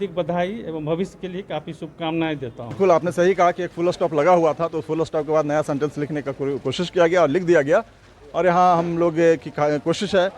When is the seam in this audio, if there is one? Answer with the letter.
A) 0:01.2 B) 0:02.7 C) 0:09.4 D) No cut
B